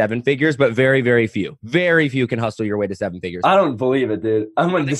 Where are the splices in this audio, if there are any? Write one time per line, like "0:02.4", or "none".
none